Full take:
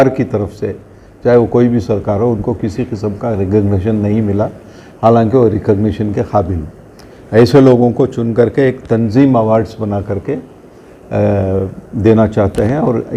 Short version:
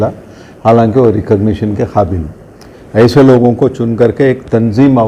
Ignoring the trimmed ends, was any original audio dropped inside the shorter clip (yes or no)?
no